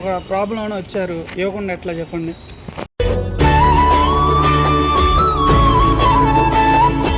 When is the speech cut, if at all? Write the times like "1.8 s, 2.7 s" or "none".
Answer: none